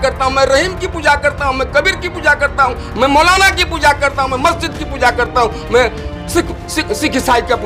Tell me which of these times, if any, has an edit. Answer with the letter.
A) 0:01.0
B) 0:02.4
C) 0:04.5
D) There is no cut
D